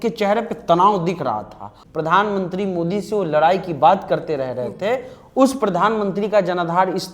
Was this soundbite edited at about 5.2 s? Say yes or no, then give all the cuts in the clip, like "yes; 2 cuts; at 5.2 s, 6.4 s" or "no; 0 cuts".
no; 1 cut; at 1.7 s